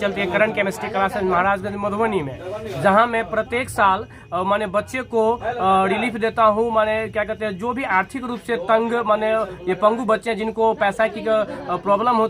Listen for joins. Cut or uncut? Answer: uncut